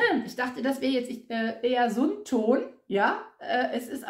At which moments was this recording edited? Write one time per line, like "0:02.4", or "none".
none